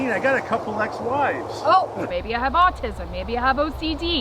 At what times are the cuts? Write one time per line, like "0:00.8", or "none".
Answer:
0:02.1